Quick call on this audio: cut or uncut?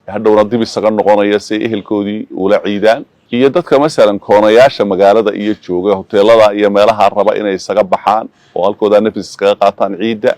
cut